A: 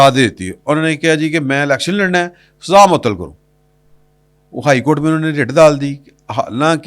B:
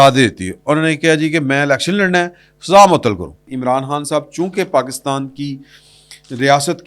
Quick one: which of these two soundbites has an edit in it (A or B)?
B